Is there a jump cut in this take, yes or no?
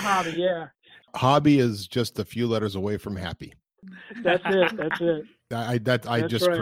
yes